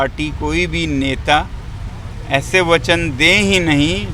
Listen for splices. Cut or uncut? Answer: uncut